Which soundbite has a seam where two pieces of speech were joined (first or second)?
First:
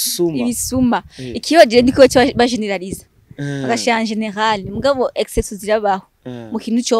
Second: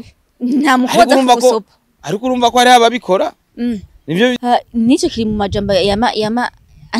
second